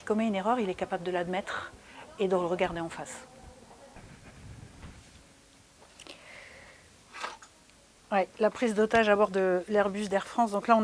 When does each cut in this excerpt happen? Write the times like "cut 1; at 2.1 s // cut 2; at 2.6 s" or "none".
none